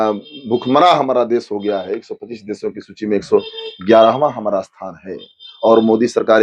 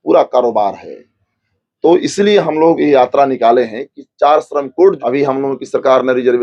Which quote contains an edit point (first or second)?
second